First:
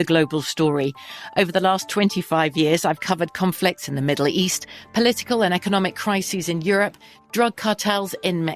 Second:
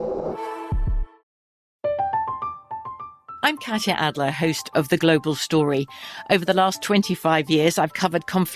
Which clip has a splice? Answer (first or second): second